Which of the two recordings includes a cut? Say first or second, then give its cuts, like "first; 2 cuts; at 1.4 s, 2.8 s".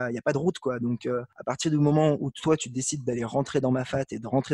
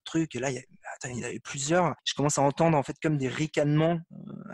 second; 1 cut; at 2.0 s